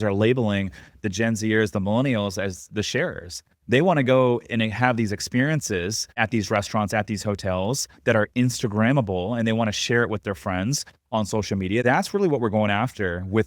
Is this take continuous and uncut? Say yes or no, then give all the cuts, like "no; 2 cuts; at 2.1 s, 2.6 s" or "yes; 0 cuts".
no; 2 cuts; at 6.1 s, 11.8 s